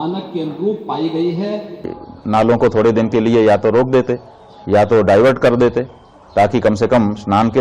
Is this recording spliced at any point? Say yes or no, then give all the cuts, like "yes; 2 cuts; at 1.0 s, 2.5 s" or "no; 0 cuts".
yes; 1 cut; at 2.0 s